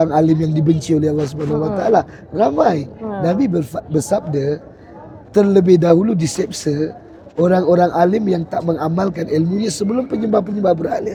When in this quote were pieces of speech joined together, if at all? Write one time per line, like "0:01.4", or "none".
none